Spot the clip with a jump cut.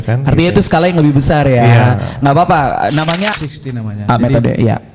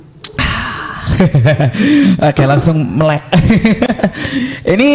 first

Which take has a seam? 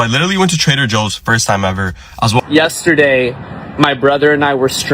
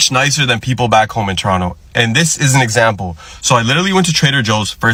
first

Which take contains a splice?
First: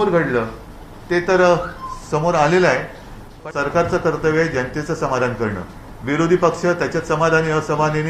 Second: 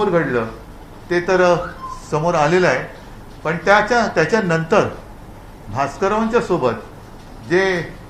first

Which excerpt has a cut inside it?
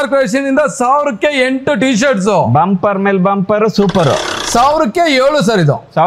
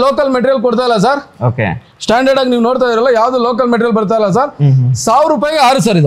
first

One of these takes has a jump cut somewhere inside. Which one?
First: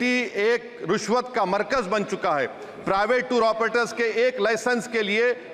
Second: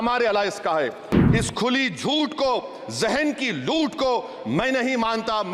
second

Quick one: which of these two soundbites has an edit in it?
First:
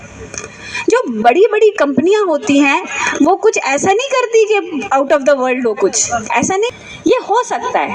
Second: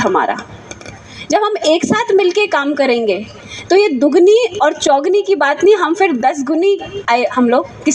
first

